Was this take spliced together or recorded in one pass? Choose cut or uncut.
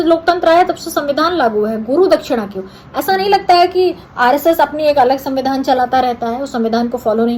uncut